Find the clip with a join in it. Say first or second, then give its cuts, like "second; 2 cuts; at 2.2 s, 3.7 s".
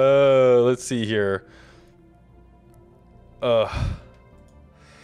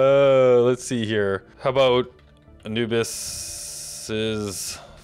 second; 1 cut; at 1.5 s